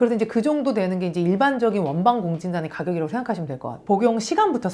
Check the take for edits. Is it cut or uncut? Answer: cut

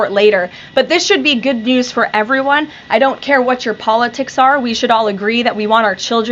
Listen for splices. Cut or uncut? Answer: uncut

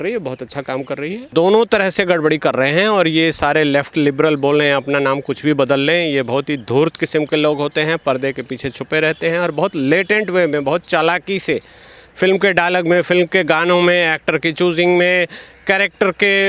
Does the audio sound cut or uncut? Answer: cut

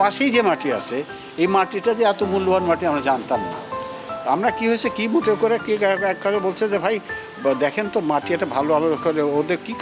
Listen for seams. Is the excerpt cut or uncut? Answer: uncut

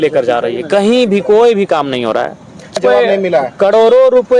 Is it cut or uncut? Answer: cut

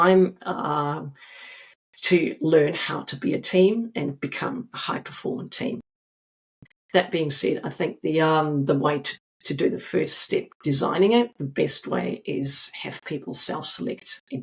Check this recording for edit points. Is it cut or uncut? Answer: uncut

